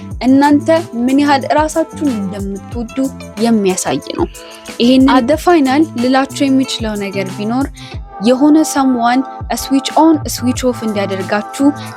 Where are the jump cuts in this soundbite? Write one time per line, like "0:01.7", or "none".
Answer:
0:05.2

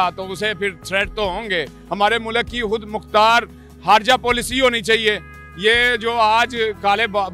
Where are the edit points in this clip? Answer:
0:01.8
0:05.3

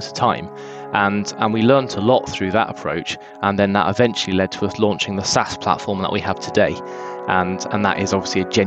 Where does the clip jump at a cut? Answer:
none

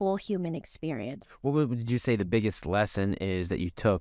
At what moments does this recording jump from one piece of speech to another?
0:01.2

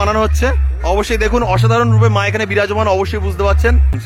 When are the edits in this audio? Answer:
none

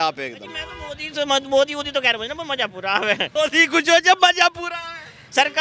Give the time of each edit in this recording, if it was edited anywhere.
0:03.3

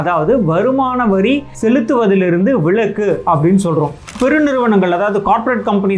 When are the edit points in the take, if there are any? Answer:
0:01.5
0:04.2

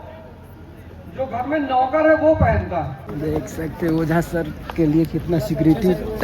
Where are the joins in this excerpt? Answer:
0:03.0

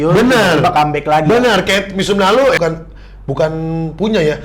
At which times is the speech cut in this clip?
0:02.6

